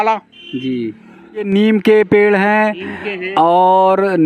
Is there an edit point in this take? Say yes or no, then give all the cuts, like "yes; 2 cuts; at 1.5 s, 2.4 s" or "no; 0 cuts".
yes; 1 cut; at 1.5 s